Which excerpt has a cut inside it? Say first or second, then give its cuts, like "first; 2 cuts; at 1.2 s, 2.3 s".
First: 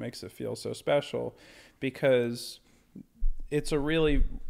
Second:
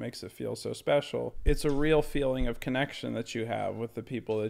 second; 1 cut; at 1.3 s